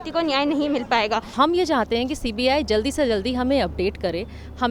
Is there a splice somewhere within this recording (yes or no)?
yes